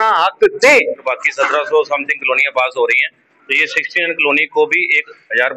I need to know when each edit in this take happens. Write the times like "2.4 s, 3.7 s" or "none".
1.1 s